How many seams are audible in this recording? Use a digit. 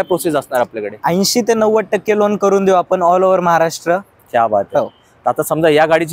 0